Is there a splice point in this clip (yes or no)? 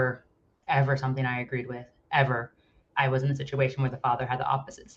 yes